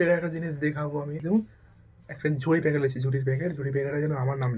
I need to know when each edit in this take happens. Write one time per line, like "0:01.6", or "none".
0:01.2